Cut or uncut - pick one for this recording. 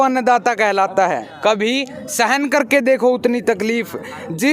cut